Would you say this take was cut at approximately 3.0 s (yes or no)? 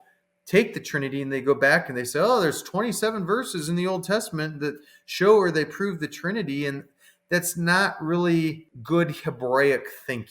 no